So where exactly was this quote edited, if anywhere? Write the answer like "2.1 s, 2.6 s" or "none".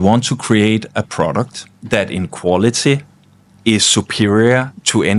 none